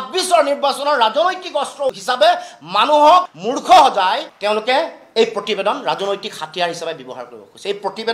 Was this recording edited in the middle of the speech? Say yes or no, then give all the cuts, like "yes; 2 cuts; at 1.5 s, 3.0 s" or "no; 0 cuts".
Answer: no; 0 cuts